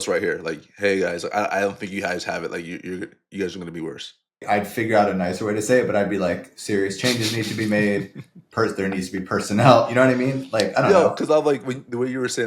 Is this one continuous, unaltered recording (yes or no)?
no